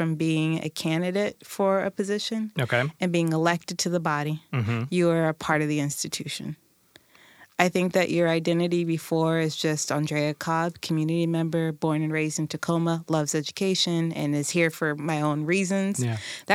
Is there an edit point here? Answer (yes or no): no